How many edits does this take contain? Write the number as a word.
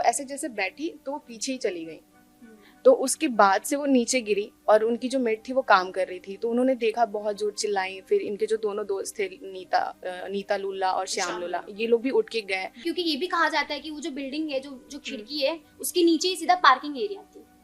one